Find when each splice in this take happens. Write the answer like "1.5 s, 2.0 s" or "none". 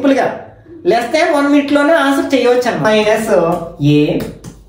2.8 s